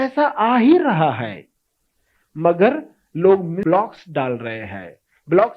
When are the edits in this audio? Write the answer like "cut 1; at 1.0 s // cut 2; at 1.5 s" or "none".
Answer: cut 1; at 3.6 s